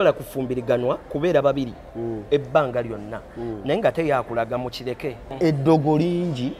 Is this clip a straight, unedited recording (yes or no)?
no